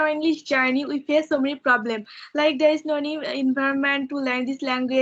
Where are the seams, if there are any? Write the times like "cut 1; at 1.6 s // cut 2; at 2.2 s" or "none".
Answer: none